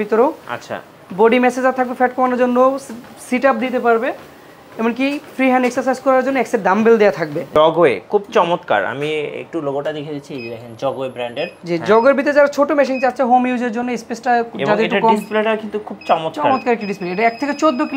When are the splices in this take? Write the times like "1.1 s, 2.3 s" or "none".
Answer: 7.5 s, 11.6 s